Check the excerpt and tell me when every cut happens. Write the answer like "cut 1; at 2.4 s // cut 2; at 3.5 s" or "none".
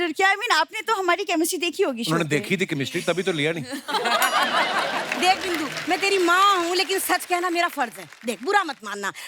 none